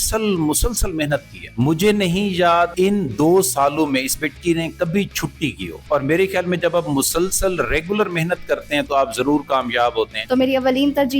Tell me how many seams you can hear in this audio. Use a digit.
4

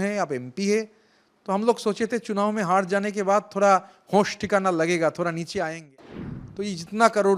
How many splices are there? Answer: 1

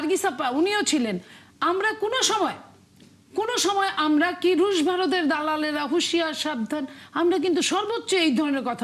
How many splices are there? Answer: 0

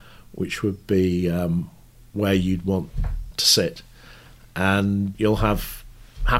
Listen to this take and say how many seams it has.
2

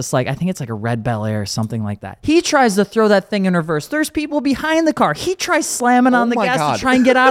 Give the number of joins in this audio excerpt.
1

